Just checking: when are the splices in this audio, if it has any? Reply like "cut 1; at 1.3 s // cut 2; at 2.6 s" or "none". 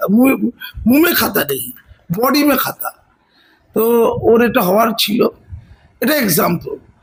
none